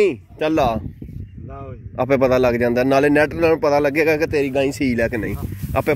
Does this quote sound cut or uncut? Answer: uncut